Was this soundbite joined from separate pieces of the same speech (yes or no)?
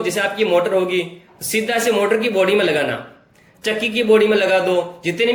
no